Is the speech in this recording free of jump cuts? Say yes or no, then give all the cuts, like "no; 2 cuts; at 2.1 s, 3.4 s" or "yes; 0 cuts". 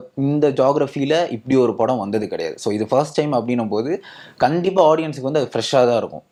yes; 0 cuts